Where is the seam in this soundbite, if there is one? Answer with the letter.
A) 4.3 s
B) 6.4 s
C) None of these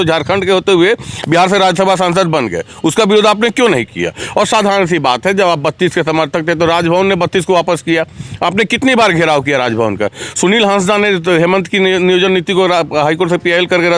C